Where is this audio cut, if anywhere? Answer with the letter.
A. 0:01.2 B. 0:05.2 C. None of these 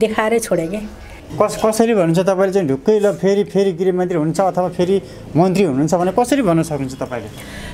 A